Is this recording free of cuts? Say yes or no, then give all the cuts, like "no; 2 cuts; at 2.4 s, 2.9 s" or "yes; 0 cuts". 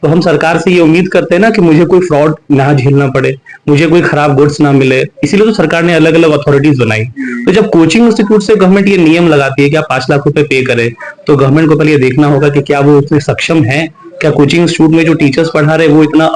yes; 0 cuts